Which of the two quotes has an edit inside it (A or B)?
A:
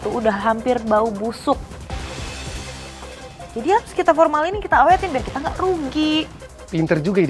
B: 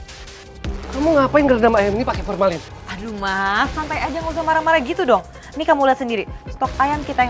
A